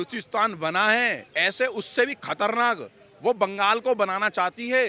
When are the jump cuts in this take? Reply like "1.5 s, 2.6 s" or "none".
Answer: none